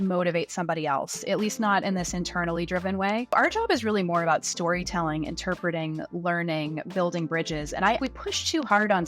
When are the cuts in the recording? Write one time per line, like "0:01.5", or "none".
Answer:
0:03.3
0:08.0